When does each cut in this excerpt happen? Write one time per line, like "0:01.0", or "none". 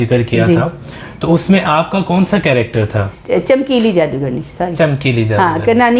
0:03.2